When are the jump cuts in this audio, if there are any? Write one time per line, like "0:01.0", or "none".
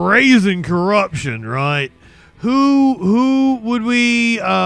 none